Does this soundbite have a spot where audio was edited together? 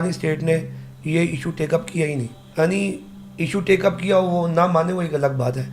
yes; 1 cut; at 2.4 s

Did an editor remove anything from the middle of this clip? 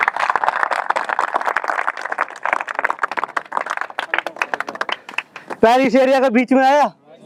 no; 0 cuts

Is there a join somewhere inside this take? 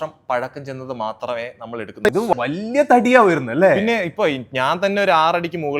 yes; 1 cut; at 2.0 s

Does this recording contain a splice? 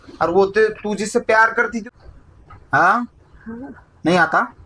yes; 1 cut; at 1.8 s

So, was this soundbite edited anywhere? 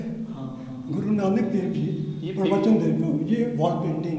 no; 0 cuts

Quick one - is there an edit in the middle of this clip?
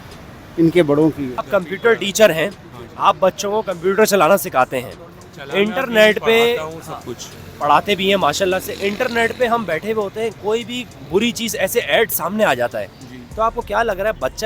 no; 0 cuts

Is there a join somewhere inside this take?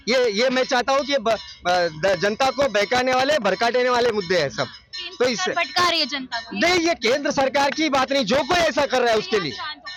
no; 0 cuts

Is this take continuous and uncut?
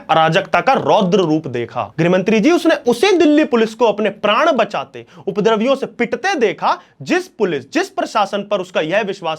no; 1 cut; at 1.8 s

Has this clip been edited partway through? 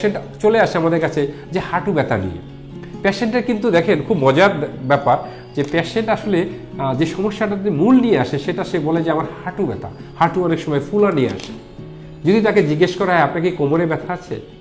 no; 0 cuts

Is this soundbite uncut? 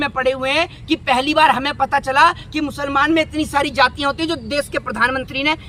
yes; 0 cuts

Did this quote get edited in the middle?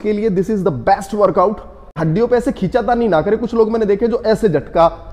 yes; 1 cut; at 2.0 s

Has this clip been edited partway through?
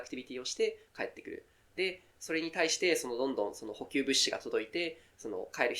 no; 0 cuts

